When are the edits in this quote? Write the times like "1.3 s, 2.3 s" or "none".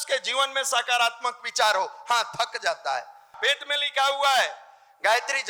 3.4 s